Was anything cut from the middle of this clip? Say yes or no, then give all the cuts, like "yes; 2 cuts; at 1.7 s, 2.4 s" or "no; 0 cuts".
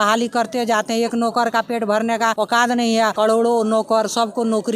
yes; 2 cuts; at 2.3 s, 3.1 s